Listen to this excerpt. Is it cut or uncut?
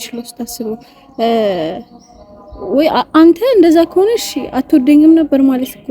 uncut